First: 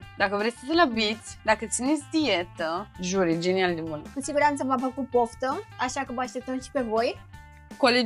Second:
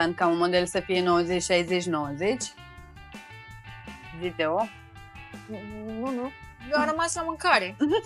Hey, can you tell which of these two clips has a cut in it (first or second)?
first